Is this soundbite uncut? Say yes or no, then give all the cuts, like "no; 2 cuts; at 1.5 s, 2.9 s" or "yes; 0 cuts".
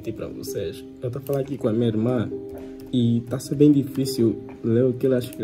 yes; 0 cuts